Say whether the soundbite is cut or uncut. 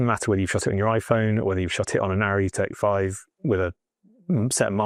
uncut